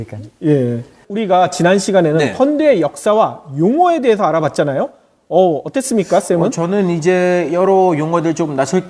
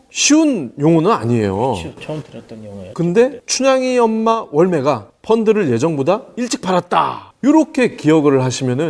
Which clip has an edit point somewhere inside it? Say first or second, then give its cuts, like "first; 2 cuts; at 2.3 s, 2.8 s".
second; 1 cut; at 5.1 s